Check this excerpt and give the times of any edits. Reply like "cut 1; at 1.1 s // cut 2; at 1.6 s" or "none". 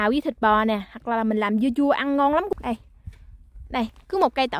cut 1; at 2.5 s